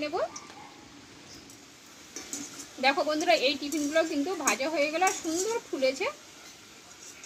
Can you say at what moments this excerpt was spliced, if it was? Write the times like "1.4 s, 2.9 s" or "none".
1.8 s

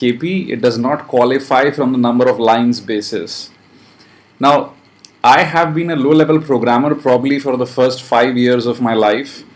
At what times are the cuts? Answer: 6.6 s

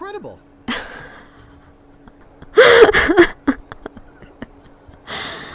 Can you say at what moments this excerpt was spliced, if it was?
2.1 s

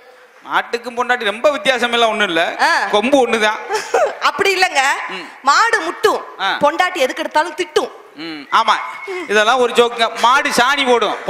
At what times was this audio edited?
none

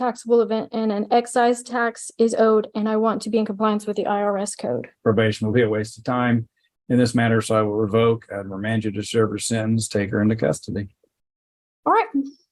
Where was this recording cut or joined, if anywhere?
4.9 s

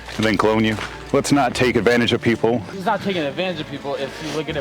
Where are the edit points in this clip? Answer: 1.0 s, 2.7 s

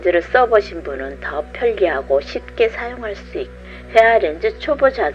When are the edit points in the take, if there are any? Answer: 3.6 s

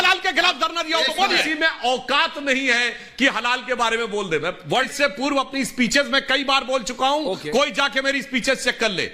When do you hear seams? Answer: 1.4 s, 4.9 s

